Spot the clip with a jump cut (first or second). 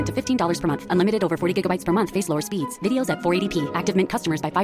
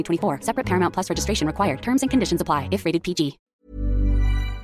second